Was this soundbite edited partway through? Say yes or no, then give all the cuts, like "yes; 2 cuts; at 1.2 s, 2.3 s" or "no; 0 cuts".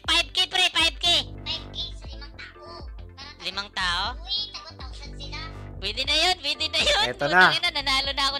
no; 0 cuts